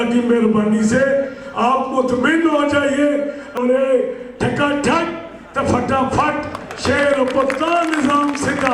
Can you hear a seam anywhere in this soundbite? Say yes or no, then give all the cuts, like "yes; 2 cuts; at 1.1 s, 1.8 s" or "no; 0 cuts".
yes; 1 cut; at 3.6 s